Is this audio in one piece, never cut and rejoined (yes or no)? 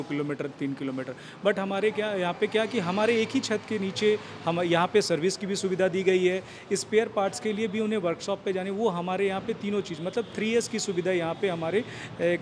yes